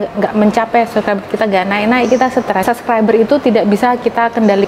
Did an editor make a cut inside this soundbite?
yes; 1 cut; at 2.8 s

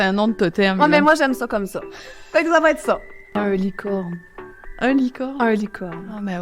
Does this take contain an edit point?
yes; 1 cut; at 3.4 s

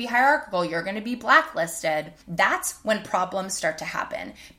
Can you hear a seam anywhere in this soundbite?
yes; 1 cut; at 2.2 s

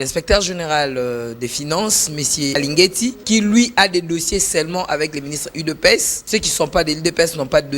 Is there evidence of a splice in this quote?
yes; 3 cuts; at 2.5 s, 3.2 s, 6.1 s

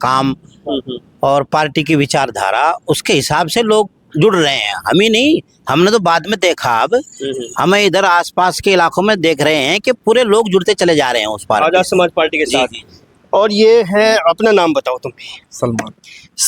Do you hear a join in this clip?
no; 0 cuts

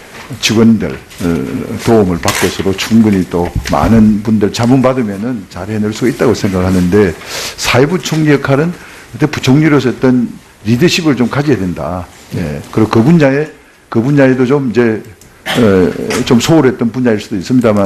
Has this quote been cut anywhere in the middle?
yes; 1 cut; at 15.8 s

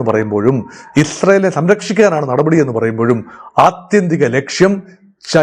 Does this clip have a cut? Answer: no; 0 cuts

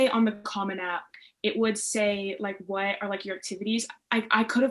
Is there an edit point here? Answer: no; 0 cuts

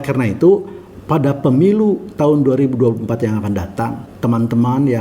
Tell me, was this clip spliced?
yes; 1 cut; at 4.0 s

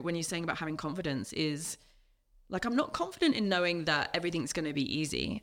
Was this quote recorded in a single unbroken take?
yes; 0 cuts

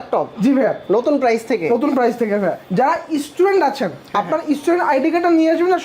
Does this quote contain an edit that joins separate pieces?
yes; 1 cut; at 2.6 s

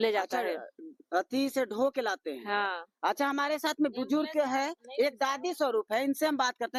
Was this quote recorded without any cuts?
yes; 0 cuts

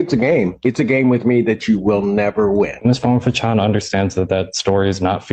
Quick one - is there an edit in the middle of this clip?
yes; 1 cut; at 2.7 s

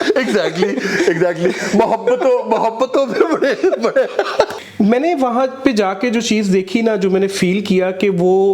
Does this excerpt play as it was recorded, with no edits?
no; 1 cut; at 4.5 s

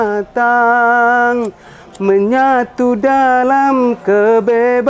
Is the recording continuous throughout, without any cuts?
yes; 0 cuts

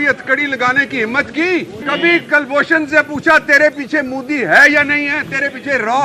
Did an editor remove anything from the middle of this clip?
yes; 1 cut; at 1.8 s

